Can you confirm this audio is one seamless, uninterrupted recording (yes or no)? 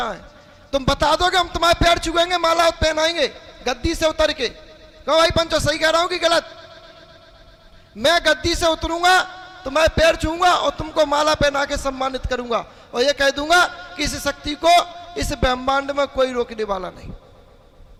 yes